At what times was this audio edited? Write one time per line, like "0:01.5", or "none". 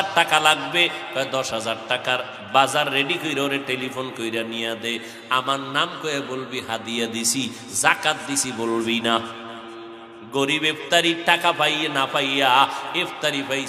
none